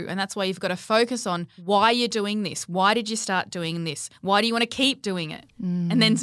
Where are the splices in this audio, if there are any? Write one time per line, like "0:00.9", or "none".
0:01.5

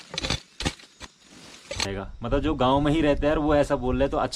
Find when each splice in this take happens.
0:01.9

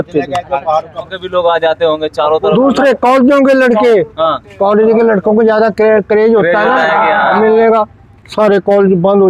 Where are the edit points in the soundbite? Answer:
0:01.2

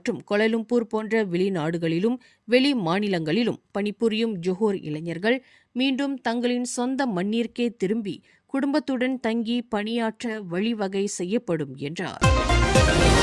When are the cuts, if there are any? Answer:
0:12.1

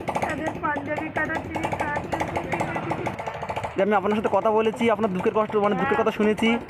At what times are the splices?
0:03.1

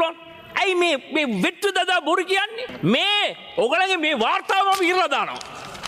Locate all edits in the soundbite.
0:02.6

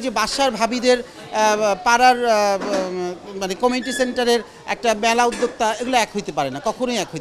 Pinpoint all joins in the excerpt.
none

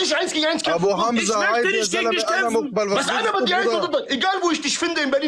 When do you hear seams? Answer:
none

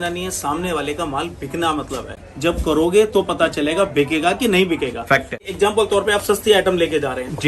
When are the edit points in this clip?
0:02.1
0:05.5

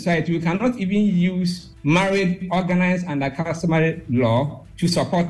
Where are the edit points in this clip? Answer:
none

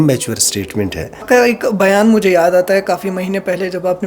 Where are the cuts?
0:01.2

